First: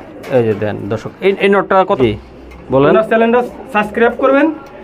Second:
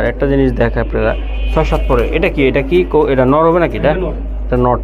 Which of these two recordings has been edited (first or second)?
first